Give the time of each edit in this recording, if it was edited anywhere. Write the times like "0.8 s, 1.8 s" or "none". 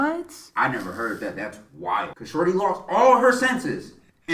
2.2 s